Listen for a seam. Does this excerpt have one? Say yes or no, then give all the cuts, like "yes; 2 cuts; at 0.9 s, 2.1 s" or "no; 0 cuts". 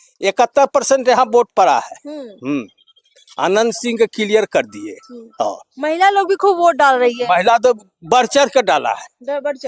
no; 0 cuts